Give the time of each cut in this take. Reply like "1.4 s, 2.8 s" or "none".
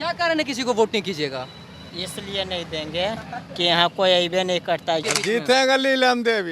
5.1 s